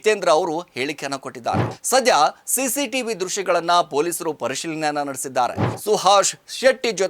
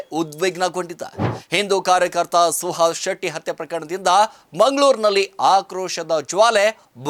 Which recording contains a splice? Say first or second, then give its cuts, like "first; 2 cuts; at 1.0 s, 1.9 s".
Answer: first; 2 cuts; at 1.7 s, 5.7 s